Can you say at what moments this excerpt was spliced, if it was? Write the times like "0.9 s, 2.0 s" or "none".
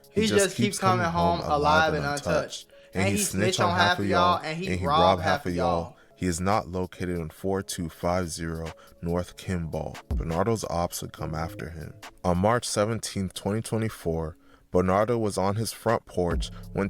6.0 s, 10.1 s